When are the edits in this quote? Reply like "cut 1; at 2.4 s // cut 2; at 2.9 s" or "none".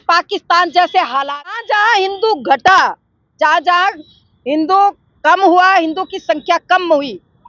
cut 1; at 1.6 s